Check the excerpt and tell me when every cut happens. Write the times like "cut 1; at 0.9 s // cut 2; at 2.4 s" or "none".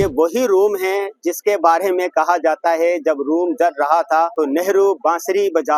cut 1; at 4.3 s